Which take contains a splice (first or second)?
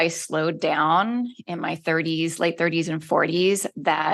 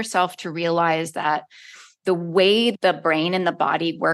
second